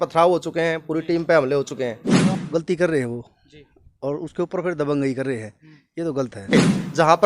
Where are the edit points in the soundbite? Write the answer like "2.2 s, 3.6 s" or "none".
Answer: 2.2 s, 6.5 s